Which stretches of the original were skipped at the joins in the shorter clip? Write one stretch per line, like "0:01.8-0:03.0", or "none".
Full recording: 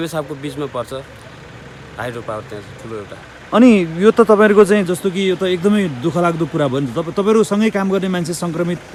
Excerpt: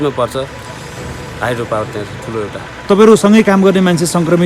0:03.4-0:07.1